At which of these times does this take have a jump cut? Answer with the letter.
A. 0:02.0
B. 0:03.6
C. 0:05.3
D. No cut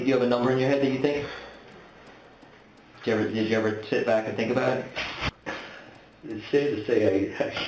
C